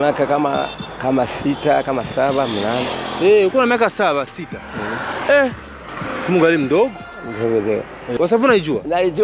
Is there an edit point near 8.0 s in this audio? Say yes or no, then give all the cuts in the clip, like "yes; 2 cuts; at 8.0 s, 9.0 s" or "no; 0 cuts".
yes; 1 cut; at 8.0 s